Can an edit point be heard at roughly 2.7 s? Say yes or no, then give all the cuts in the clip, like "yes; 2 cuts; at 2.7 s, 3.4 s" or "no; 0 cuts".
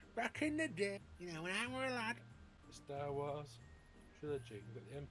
yes; 2 cuts; at 1.1 s, 2.7 s